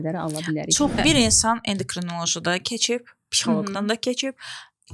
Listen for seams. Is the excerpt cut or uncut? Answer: cut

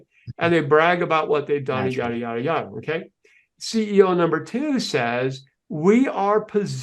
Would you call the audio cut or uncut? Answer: uncut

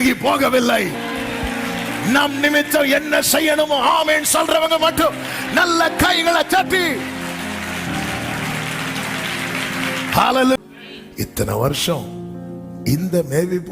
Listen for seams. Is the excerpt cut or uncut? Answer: cut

